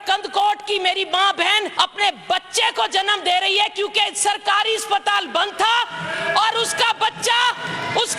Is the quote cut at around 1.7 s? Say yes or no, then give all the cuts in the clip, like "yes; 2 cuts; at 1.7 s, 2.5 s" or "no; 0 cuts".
yes; 1 cut; at 1.7 s